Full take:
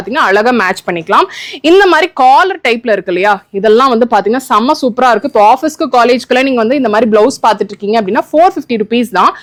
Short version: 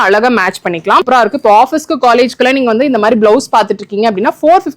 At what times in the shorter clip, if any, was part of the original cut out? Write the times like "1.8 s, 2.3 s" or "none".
1.0 s